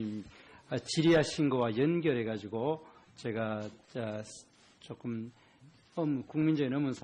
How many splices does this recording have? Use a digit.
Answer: 0